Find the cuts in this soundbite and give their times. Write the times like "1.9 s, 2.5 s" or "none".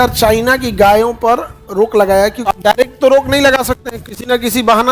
2.4 s